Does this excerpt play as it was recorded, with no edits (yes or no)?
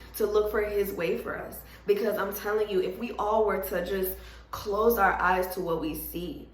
yes